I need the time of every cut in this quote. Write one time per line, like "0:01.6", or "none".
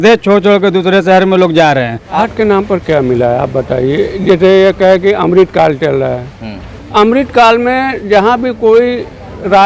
0:02.3